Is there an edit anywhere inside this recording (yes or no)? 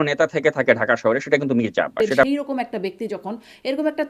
yes